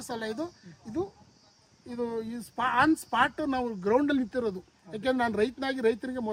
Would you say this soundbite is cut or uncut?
uncut